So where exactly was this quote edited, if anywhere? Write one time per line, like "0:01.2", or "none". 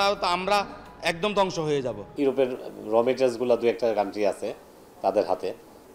0:02.0